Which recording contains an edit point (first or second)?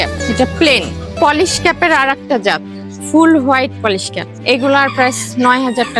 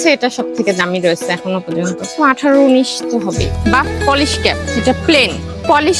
second